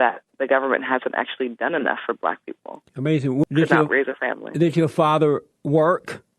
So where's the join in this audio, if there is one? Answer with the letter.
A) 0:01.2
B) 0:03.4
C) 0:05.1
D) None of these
B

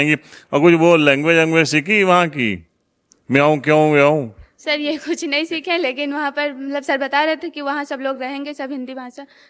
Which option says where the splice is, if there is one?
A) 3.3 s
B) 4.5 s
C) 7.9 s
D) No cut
D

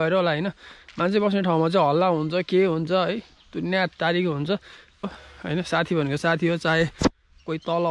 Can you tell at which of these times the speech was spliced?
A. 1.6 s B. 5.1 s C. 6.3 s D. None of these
B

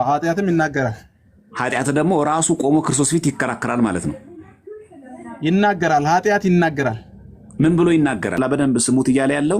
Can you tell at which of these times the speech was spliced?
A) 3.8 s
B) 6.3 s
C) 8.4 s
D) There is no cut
C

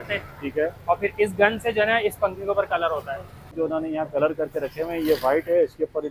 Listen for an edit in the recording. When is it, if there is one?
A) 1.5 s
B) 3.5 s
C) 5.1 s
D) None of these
B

